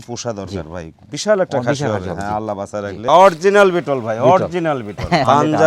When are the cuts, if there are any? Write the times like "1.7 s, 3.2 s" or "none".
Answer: 2.9 s